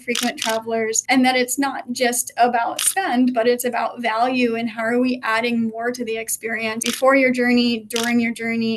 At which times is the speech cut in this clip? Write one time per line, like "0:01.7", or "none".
0:01.0
0:06.9